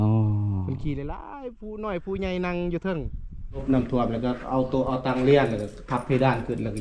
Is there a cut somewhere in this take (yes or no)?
yes